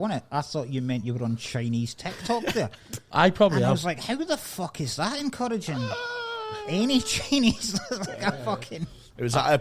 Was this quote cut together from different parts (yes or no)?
no